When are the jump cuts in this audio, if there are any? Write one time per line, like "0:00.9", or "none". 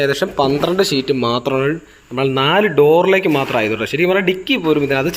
none